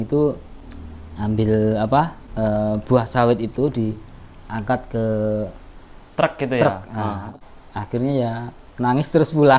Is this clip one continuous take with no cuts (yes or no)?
no